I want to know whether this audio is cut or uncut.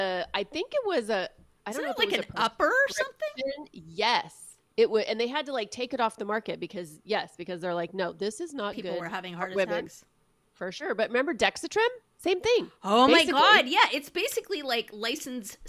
uncut